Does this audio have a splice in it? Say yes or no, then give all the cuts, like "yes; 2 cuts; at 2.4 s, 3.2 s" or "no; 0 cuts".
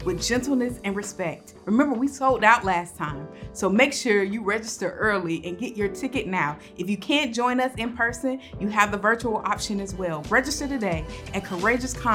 yes; 1 cut; at 10.2 s